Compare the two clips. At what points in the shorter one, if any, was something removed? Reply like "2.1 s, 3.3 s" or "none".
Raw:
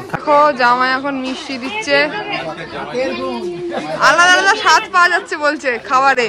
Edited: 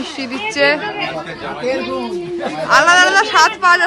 none